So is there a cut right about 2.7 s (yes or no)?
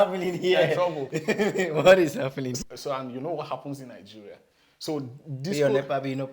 yes